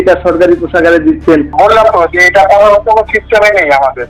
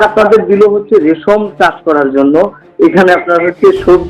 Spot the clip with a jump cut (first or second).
first